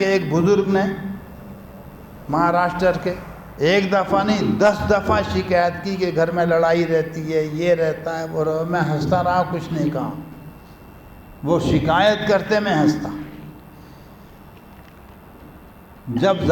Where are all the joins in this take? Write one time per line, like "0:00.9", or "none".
none